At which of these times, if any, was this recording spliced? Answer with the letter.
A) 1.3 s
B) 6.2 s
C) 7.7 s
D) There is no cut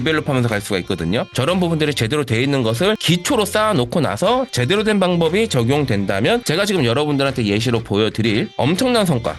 A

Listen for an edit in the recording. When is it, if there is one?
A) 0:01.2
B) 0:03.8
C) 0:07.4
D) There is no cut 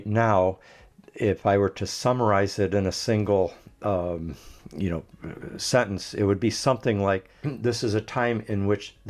C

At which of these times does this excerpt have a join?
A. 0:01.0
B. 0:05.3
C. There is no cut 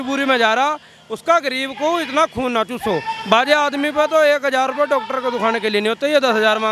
C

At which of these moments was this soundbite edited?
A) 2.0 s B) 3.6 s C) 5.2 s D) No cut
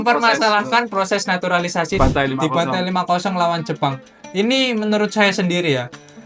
A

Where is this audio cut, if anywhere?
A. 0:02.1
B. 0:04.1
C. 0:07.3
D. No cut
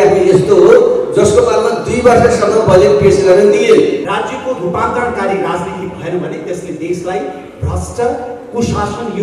B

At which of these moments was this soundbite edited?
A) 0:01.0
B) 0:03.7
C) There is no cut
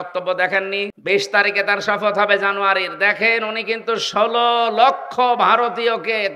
A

